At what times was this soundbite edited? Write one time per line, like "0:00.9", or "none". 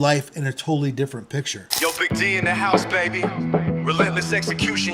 0:01.6